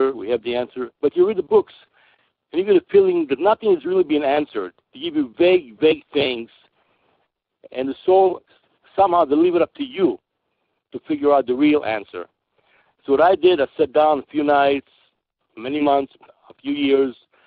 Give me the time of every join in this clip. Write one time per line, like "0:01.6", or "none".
0:03.1

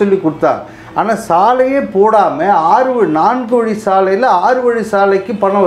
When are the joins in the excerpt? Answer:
none

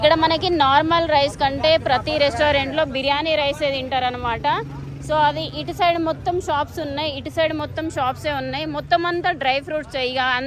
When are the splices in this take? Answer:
none

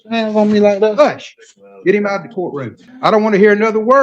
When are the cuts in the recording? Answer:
0:02.8

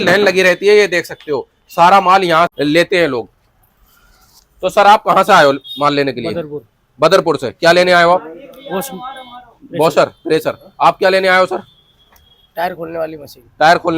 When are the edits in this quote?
0:02.5

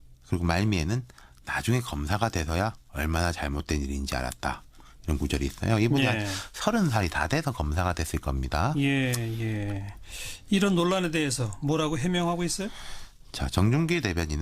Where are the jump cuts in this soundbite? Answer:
0:12.4

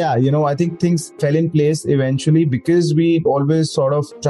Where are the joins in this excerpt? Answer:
0:03.2

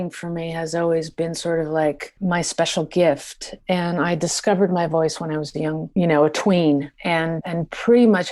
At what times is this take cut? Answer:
0:02.1
0:05.8
0:07.3

